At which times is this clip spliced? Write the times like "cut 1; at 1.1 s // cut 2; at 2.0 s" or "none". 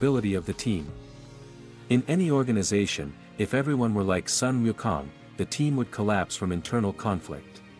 none